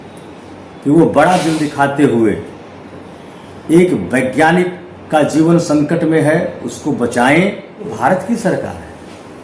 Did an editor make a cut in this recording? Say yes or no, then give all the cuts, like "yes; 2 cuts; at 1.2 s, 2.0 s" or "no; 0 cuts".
yes; 1 cut; at 7.9 s